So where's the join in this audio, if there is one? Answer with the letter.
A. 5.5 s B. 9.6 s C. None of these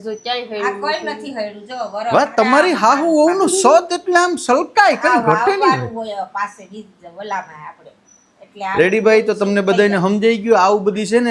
C